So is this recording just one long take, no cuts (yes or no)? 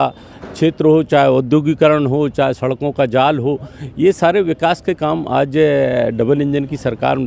yes